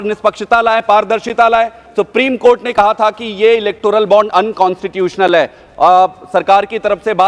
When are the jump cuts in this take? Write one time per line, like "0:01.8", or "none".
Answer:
0:01.8